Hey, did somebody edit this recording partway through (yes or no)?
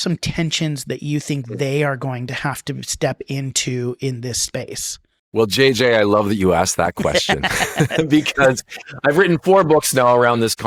no